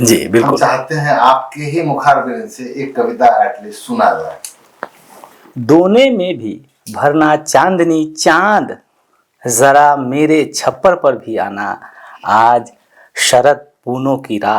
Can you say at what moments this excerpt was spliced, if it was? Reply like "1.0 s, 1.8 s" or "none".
5.3 s